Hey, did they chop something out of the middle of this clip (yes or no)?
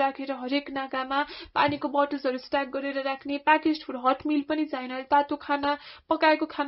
no